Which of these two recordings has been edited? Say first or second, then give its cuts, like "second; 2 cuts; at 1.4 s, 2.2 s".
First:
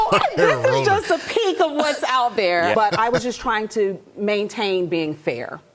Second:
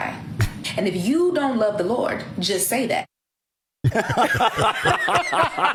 first; 1 cut; at 2.7 s